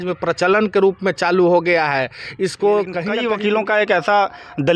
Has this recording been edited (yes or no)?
yes